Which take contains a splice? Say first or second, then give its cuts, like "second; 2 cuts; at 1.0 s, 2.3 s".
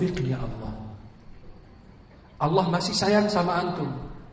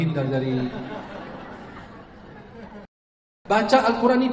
second; 1 cut; at 3.3 s